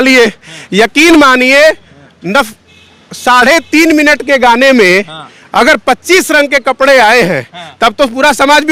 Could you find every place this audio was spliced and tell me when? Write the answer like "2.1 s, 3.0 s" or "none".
none